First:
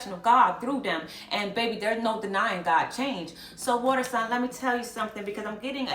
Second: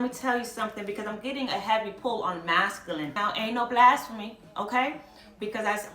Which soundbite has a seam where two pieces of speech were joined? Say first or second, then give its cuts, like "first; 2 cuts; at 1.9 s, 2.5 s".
second; 1 cut; at 3.1 s